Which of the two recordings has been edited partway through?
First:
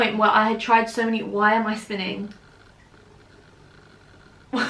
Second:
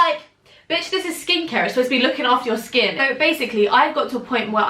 second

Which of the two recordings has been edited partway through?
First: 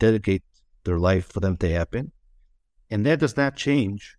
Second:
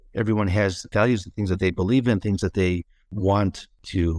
second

